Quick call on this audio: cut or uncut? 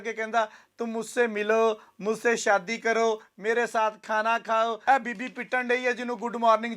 cut